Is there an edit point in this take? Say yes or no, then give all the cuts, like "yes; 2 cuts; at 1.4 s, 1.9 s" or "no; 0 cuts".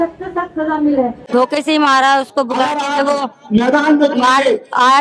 yes; 1 cut; at 1.2 s